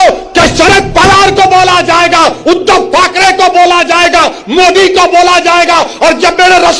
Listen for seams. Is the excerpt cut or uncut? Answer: uncut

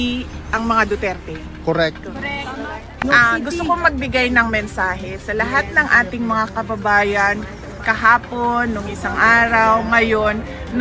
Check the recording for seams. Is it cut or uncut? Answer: cut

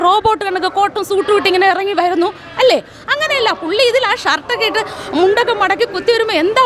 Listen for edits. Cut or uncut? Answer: uncut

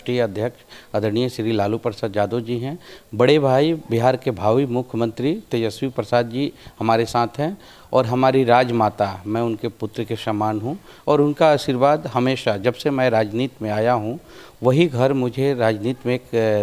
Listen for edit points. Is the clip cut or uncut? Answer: uncut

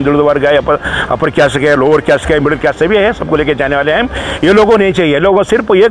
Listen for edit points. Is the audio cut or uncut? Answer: uncut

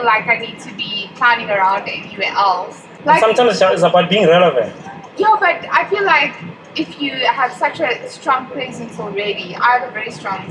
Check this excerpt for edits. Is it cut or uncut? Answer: uncut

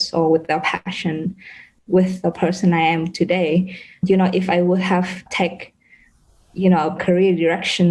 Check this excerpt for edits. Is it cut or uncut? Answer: cut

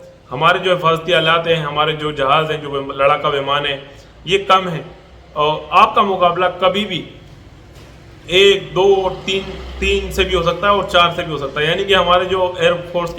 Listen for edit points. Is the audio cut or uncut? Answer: uncut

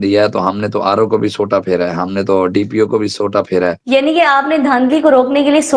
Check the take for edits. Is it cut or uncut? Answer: cut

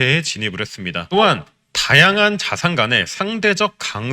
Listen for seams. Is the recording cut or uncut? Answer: cut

